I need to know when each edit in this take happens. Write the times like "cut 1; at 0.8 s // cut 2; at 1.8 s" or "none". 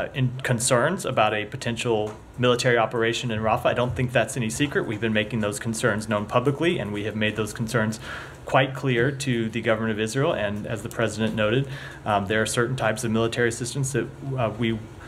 none